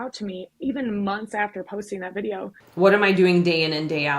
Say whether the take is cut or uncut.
cut